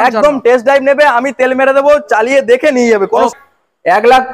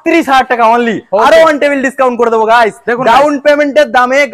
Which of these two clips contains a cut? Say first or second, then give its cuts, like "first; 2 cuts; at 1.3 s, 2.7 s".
first; 1 cut; at 3.3 s